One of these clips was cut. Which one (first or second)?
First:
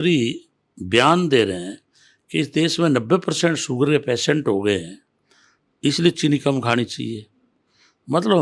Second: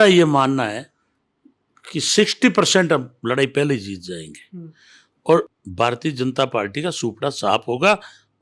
second